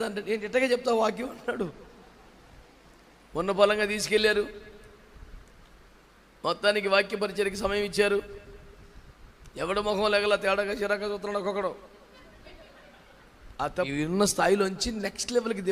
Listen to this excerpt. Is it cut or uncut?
cut